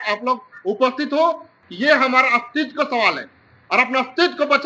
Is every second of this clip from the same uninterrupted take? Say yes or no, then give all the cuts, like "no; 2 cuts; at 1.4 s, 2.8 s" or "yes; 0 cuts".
no; 1 cut; at 1.5 s